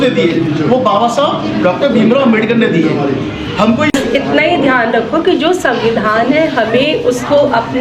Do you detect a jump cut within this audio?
yes; 1 cut; at 3.9 s

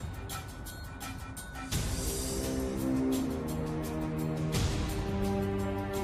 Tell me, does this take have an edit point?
yes; 1 cut; at 2.6 s

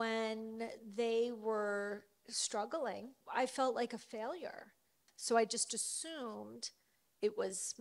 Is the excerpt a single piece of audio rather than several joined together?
no; 2 cuts; at 3.2 s, 5.0 s

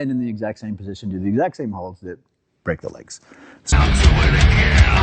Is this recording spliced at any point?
yes; 1 cut; at 3.7 s

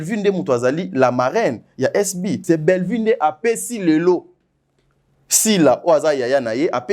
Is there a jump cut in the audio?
yes; 1 cut; at 2.4 s

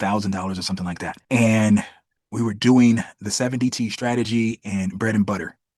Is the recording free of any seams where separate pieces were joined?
no; 1 cut; at 1.1 s

